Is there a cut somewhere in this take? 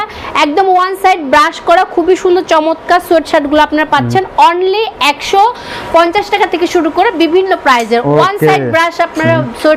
no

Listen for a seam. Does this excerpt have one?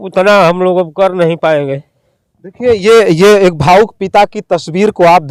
no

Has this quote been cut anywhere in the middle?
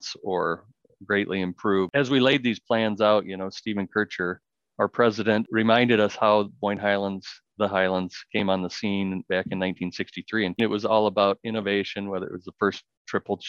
yes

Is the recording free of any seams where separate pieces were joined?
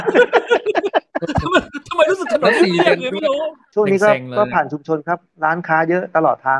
no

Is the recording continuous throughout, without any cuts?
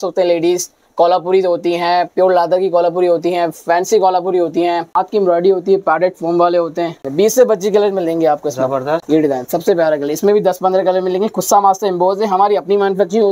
no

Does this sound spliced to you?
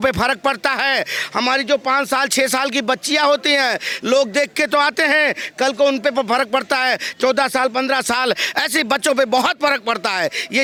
no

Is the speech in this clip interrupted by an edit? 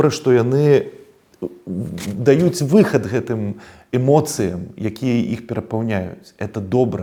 no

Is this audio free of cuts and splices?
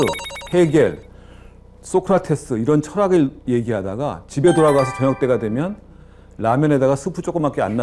yes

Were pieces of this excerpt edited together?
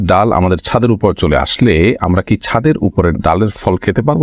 no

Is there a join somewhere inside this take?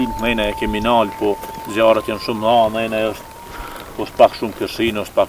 no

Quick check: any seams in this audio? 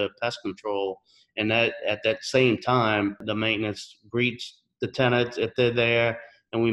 yes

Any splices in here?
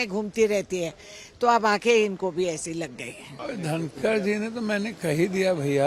no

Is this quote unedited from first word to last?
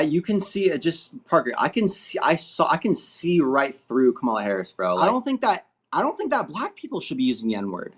no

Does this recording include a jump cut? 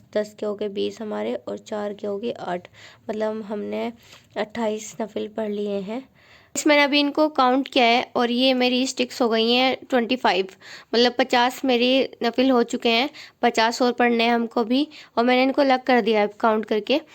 yes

